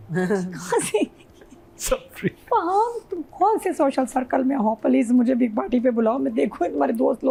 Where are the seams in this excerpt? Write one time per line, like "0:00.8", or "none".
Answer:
none